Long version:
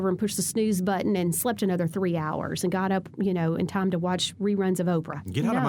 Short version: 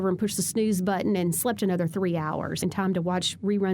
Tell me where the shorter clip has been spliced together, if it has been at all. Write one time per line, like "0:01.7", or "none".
0:02.6